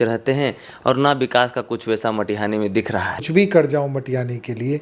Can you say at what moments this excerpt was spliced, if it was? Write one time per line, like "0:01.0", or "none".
0:03.3